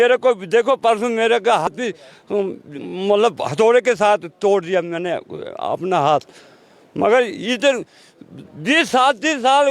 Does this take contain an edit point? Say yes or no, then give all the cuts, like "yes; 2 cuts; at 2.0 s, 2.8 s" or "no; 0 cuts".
yes; 1 cut; at 1.7 s